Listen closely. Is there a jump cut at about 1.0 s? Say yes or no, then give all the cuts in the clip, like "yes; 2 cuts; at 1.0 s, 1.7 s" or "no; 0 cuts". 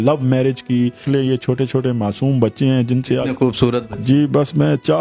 yes; 1 cut; at 1.0 s